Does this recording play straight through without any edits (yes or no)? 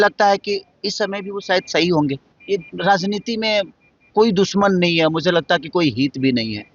no